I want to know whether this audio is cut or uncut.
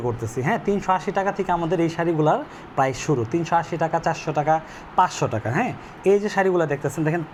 uncut